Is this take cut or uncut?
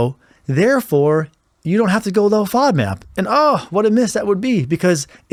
uncut